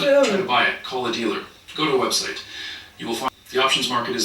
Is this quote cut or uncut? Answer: cut